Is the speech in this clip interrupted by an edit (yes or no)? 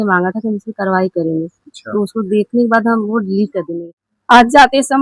yes